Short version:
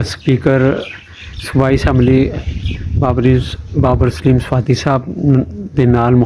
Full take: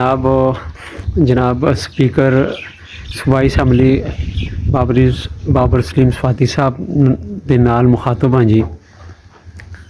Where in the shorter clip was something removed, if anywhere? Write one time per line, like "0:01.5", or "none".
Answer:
none